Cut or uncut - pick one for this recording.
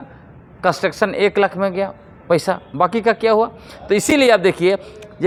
uncut